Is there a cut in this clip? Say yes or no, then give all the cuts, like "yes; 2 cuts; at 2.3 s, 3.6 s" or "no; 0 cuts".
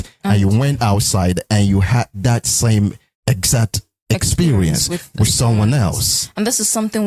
no; 0 cuts